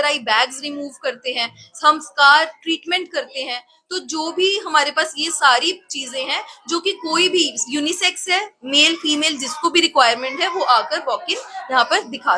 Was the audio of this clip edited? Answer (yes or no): no